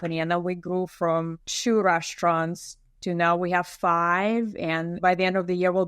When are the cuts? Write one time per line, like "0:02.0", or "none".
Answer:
0:01.5
0:05.0